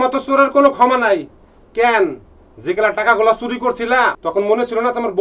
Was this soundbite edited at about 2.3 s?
no; 1 cut; at 4.2 s

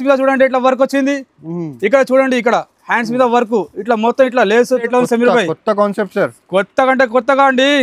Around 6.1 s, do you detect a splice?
no; 1 cut; at 4.9 s

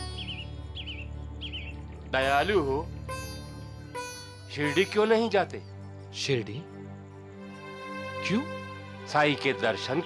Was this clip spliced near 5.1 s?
no; 0 cuts

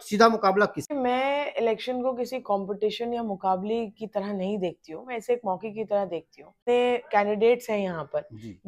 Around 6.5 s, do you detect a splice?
yes; 2 cuts; at 0.9 s, 6.5 s

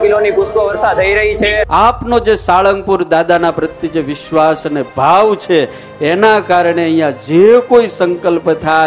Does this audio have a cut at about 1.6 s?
yes; 1 cut; at 1.6 s

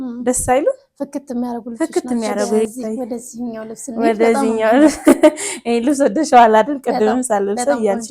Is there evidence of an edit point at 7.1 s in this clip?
no; 1 cut; at 2.7 s

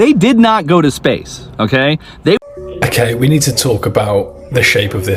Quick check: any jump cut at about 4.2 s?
no; 1 cut; at 2.4 s

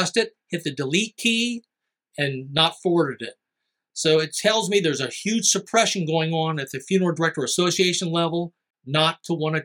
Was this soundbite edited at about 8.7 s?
yes; 1 cut; at 8.7 s

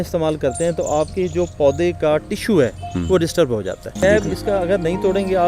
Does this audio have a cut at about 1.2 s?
no; 1 cut; at 3.9 s

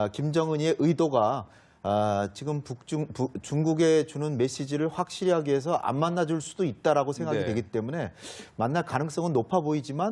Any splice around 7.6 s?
no; 0 cuts

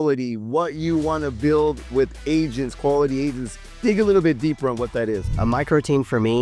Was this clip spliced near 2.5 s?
no; 1 cut; at 5.3 s

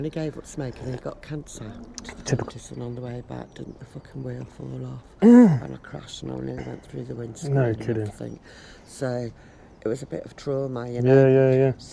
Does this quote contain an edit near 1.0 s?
no; 1 cut; at 2.5 s

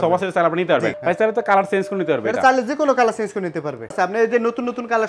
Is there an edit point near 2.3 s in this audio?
no; 2 cuts; at 0.9 s, 3.9 s

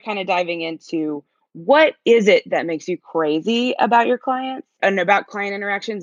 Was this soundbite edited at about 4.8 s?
yes; 1 cut; at 4.8 s

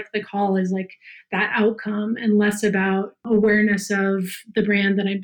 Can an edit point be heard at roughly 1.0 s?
no; 1 cut; at 3.2 s

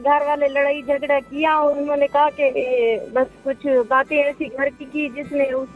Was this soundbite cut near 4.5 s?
no; 0 cuts

